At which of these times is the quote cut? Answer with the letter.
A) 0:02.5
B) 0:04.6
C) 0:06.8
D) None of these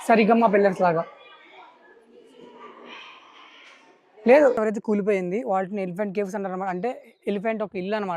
B